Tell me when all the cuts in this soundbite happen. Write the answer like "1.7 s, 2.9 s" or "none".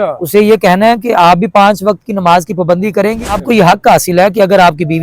3.3 s